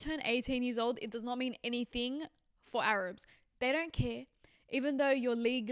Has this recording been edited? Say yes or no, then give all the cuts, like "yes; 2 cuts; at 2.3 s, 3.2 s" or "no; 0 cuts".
no; 0 cuts